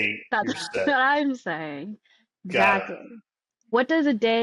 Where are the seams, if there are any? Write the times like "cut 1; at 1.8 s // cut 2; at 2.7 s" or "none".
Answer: none